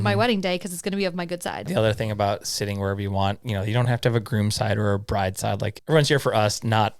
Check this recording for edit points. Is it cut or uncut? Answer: cut